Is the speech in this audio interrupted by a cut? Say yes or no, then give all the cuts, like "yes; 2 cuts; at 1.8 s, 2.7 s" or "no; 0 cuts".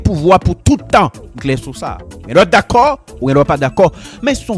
no; 0 cuts